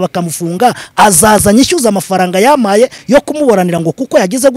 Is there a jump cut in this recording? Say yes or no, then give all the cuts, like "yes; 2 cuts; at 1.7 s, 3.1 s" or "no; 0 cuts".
no; 0 cuts